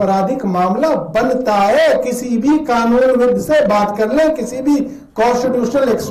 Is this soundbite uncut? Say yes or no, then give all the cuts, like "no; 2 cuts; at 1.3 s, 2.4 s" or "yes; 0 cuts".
yes; 0 cuts